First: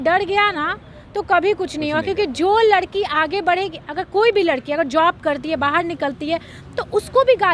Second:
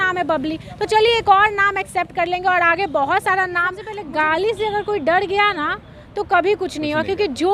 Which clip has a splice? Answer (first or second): second